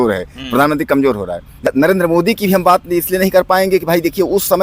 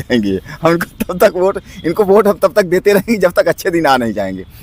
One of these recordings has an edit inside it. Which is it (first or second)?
first